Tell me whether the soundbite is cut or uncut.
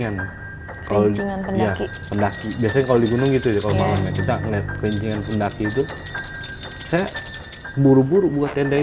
uncut